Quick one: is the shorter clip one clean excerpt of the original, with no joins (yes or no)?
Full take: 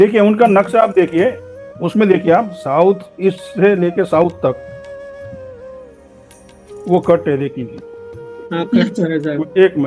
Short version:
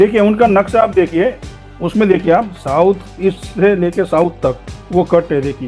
no